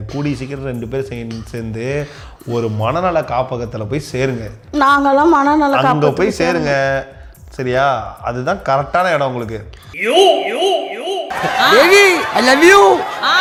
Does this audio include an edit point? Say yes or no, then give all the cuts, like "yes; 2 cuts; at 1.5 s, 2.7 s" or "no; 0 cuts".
no; 0 cuts